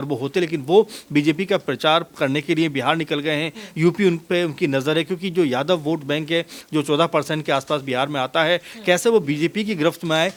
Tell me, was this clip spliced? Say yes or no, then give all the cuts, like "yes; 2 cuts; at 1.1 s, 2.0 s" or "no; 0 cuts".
no; 0 cuts